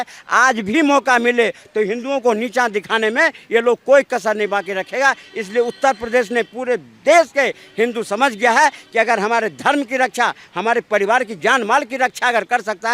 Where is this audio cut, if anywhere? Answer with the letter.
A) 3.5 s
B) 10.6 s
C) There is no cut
C